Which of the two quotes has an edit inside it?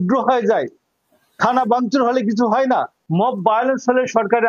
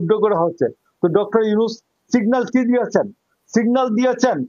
first; 1 cut; at 3.0 s

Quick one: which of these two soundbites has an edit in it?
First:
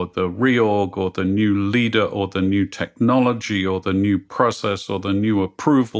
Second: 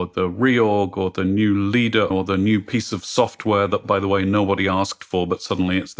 second; 1 cut; at 2.1 s

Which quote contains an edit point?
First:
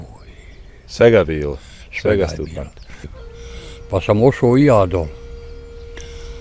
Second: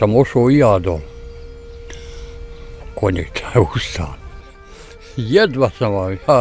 first; 1 cut; at 3.1 s

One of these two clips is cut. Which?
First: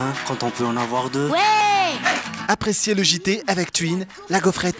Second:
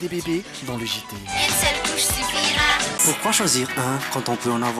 second; 1 cut; at 2.9 s

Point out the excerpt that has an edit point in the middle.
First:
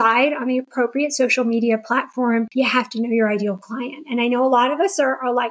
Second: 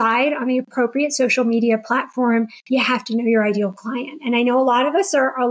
first; 1 cut; at 2.5 s

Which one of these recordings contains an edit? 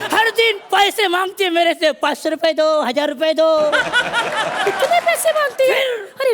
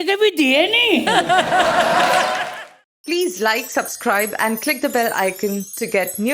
second; 1 cut; at 2.4 s

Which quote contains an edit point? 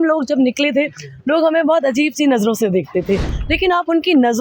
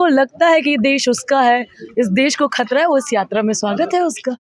first; 1 cut; at 3.3 s

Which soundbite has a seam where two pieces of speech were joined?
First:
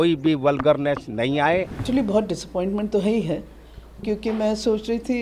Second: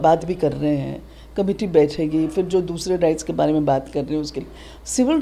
first; 1 cut; at 1.8 s

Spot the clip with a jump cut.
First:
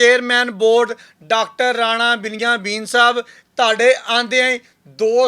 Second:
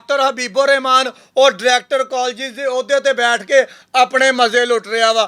first; 1 cut; at 3.4 s

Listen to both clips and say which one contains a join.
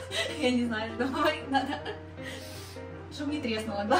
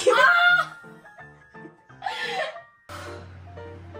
second; 1 cut; at 2.8 s

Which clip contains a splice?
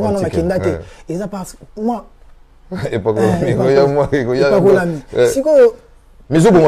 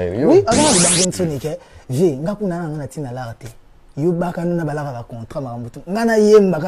second; 1 cut; at 1.0 s

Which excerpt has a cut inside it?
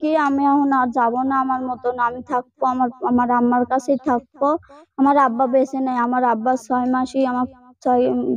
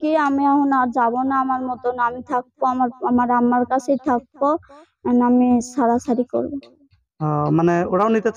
first; 1 cut; at 4.8 s

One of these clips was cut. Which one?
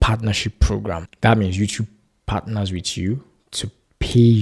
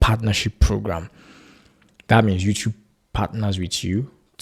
first; 1 cut; at 1.1 s

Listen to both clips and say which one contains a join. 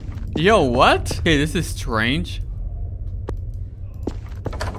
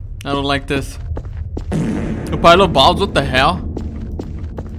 first; 1 cut; at 1.2 s

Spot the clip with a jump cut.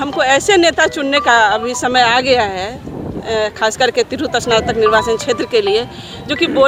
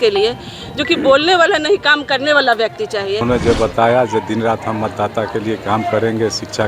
second; 1 cut; at 3.2 s

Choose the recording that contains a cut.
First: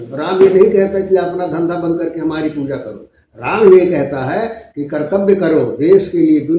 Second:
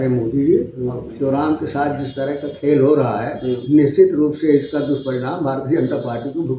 second; 1 cut; at 1.1 s

